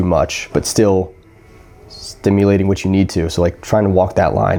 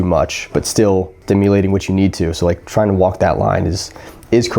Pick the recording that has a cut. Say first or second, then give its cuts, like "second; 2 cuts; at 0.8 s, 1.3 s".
second; 1 cut; at 1.1 s